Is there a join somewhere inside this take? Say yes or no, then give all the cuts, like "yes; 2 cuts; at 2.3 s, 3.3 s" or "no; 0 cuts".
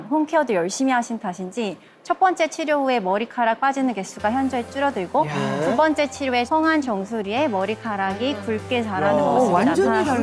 no; 0 cuts